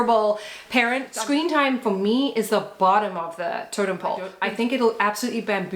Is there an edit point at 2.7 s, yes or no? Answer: no